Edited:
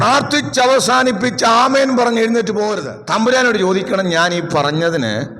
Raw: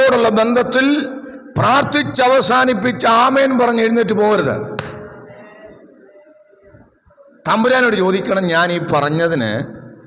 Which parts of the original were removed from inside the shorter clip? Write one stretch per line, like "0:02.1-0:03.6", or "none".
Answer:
0:04.3-0:07.1